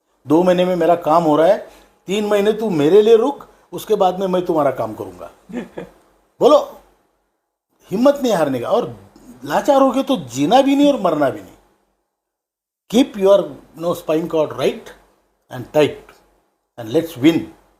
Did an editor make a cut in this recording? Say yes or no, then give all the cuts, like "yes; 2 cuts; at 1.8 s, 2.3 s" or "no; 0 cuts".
no; 0 cuts